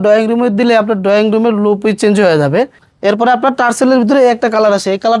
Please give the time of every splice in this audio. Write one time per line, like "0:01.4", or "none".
0:02.8